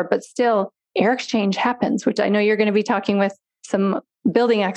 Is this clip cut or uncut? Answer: uncut